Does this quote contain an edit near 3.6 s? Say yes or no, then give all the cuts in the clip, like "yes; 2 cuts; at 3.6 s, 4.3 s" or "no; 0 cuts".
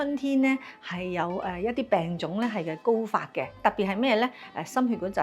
yes; 1 cut; at 3.6 s